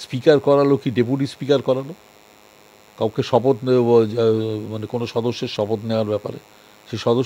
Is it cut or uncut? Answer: uncut